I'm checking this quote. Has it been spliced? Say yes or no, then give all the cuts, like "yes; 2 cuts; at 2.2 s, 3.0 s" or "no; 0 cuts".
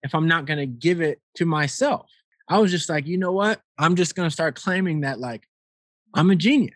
yes; 3 cuts; at 1.3 s, 2.3 s, 3.7 s